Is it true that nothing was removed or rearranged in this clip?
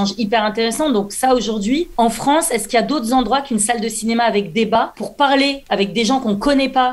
no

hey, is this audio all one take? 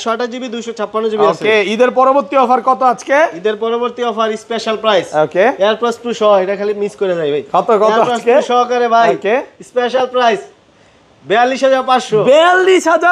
yes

